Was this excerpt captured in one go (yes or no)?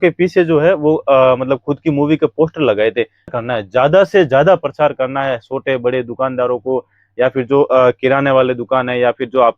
no